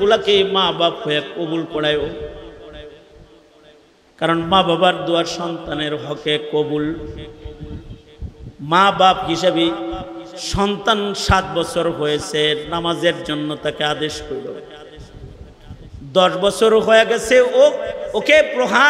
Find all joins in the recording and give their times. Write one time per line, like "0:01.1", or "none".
none